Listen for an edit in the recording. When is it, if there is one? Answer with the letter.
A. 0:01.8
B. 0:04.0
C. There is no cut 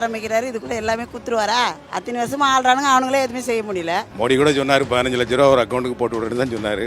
C